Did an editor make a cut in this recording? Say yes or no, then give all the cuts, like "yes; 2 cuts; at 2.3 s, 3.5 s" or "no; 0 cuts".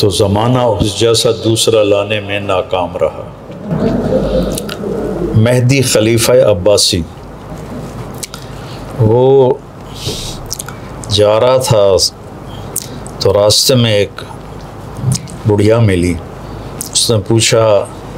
no; 0 cuts